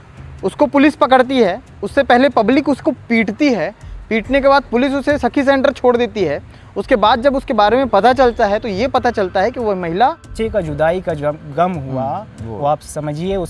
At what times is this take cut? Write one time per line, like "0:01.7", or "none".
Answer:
0:10.3